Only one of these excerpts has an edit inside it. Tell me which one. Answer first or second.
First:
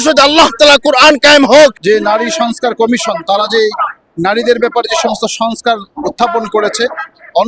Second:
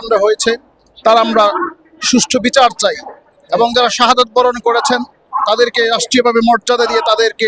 first